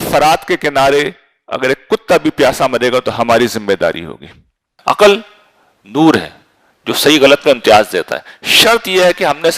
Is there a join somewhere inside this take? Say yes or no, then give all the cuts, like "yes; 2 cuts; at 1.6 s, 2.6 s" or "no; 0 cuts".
yes; 1 cut; at 4.6 s